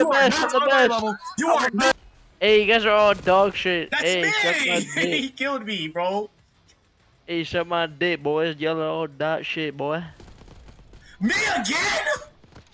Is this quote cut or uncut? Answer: cut